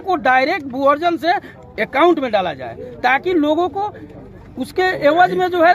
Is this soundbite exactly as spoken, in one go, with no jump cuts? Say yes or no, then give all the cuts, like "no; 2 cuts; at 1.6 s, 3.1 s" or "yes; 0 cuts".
yes; 0 cuts